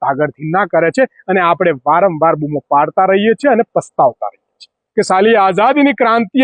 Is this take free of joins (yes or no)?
no